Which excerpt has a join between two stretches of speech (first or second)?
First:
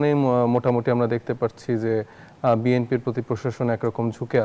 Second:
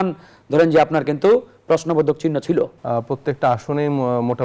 second